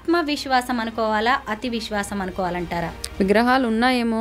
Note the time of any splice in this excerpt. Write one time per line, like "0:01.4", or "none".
0:03.0